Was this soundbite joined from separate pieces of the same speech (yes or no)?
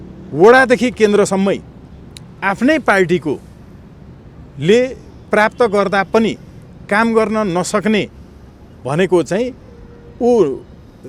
no